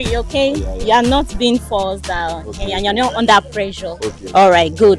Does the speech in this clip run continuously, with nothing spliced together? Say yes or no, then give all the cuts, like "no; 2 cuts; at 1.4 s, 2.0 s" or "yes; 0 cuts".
yes; 0 cuts